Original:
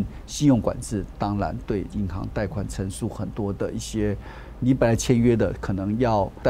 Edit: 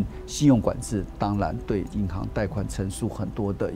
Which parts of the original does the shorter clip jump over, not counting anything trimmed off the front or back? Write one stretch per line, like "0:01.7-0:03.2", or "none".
none